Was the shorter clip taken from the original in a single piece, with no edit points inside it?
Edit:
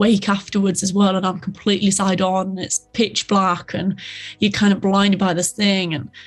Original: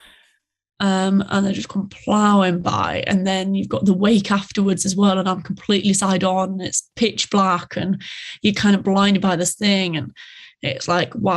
yes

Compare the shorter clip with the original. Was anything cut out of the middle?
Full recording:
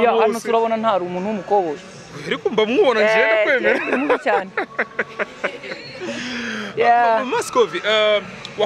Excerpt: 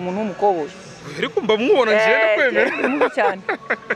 no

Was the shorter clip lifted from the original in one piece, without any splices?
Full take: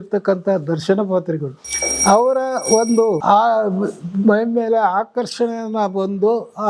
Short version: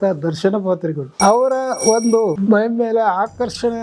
no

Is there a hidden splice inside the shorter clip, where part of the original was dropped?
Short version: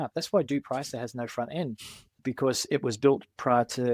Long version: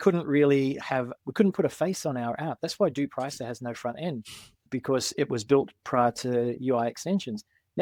no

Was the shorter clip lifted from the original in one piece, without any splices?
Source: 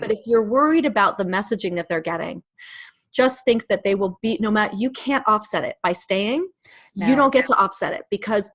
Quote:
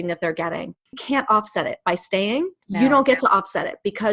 no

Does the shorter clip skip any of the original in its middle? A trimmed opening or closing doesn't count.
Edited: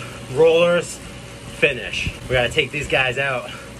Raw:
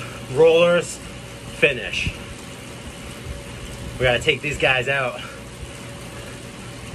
yes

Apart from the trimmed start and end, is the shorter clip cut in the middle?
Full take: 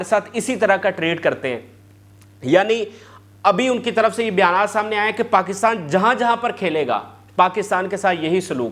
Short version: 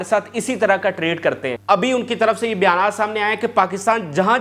yes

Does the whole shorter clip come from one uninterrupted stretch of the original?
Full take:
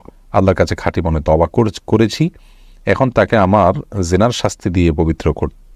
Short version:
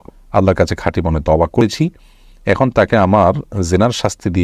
no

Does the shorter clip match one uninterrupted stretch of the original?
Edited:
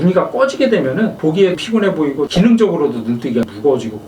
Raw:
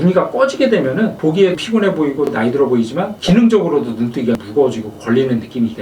no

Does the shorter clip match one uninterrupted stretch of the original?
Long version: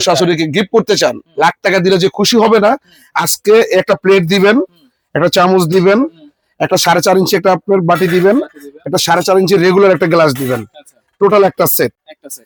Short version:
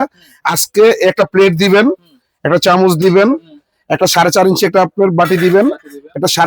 yes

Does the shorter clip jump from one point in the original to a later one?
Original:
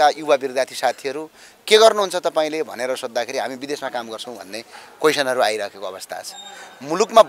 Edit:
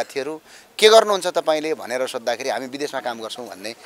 no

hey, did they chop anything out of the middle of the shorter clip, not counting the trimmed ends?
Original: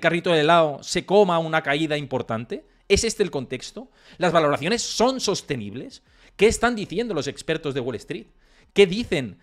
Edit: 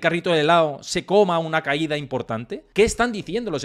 yes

